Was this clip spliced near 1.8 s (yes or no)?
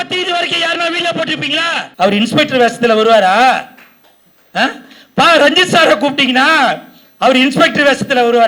yes